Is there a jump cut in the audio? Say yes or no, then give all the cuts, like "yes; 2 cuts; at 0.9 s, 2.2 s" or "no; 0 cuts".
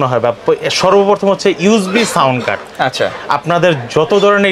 no; 0 cuts